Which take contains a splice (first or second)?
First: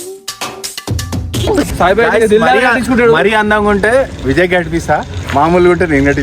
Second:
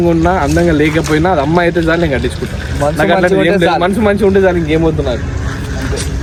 first